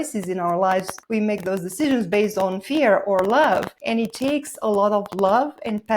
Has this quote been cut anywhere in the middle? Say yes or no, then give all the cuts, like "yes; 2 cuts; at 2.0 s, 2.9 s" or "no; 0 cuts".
yes; 2 cuts; at 1.0 s, 3.8 s